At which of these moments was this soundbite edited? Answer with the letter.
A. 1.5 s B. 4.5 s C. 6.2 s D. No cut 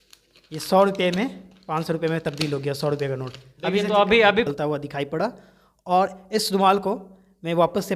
B